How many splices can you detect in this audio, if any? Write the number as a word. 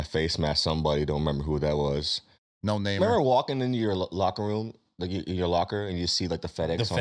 one